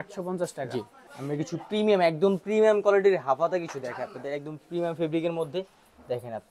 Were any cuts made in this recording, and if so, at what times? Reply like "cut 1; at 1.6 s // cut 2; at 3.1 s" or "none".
none